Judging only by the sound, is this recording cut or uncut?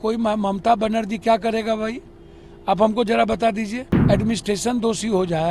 cut